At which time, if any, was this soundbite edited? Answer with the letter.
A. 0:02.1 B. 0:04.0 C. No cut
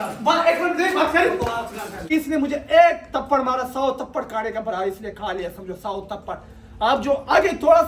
A